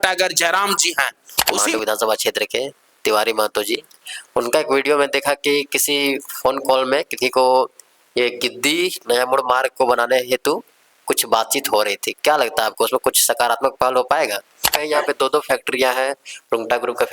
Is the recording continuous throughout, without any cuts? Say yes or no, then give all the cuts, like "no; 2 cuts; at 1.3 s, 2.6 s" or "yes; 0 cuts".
no; 2 cuts; at 1.3 s, 14.8 s